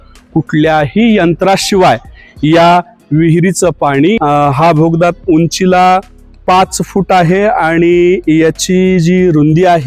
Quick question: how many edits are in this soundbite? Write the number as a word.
one